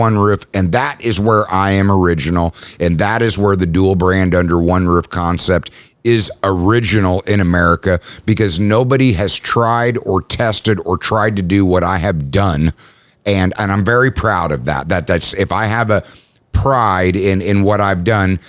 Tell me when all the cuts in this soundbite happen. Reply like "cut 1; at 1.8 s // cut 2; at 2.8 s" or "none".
none